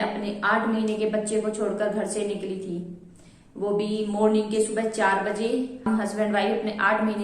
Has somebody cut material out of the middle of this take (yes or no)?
yes